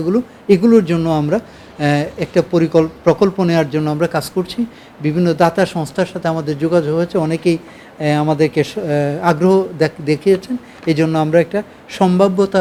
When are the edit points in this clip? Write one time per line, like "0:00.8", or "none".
none